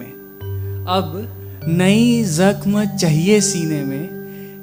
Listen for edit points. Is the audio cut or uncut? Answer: uncut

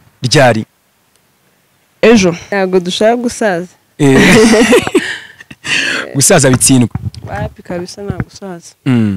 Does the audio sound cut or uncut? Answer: cut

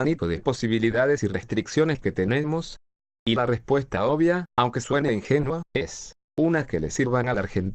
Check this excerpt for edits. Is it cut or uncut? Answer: cut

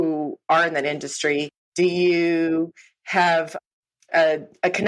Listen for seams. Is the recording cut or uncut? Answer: cut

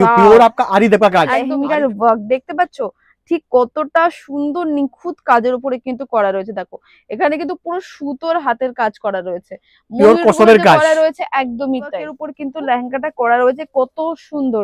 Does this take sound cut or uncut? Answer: cut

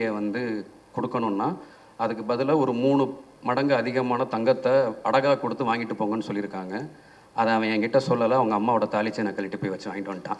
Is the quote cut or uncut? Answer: uncut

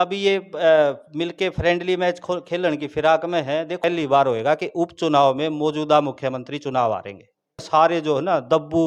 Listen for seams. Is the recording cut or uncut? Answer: cut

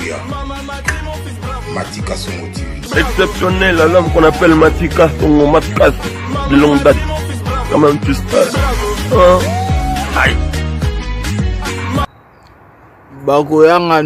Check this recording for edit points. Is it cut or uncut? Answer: uncut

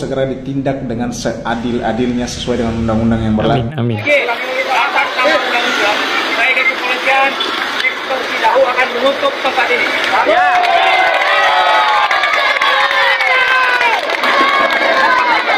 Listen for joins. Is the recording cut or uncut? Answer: uncut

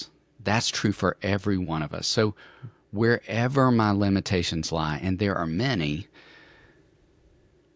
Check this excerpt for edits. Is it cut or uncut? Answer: uncut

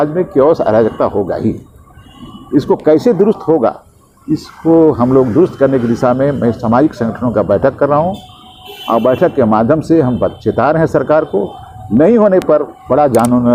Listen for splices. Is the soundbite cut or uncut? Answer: uncut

